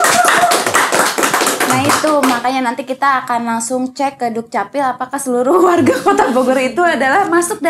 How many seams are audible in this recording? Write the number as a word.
zero